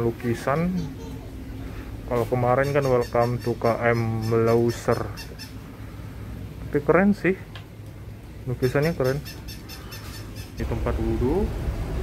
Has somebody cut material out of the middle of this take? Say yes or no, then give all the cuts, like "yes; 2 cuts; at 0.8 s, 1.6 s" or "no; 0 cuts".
yes; 1 cut; at 10.6 s